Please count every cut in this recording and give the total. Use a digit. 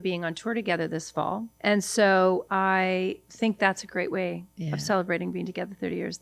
2